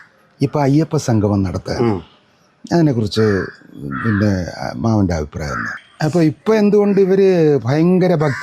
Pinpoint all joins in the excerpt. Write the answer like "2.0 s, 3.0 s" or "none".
5.6 s

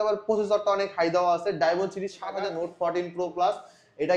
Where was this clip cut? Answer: 2.4 s

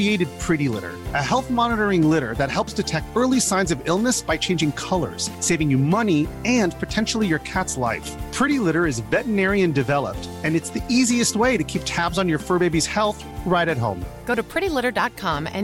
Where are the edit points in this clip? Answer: none

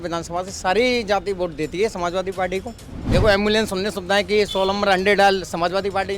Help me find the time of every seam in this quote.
2.9 s

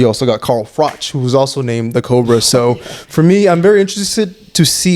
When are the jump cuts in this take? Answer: none

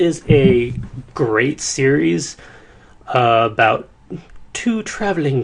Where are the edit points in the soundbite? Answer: none

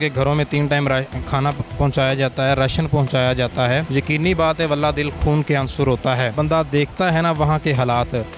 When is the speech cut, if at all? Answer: 3.9 s, 6.3 s

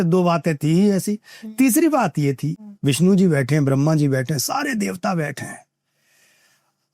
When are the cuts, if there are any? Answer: 2.5 s

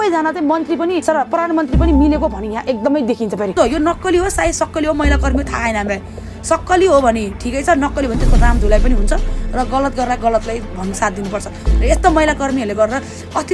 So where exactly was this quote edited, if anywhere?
1.0 s, 3.5 s

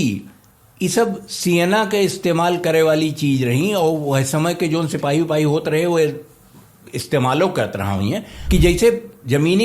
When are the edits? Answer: 8.3 s

